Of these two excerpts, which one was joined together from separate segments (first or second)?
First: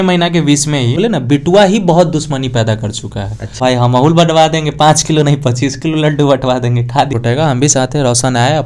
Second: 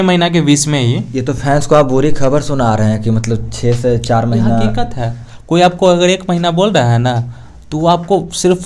first